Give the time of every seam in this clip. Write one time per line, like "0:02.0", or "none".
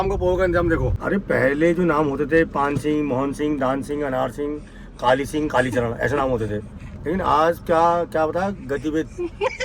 0:01.0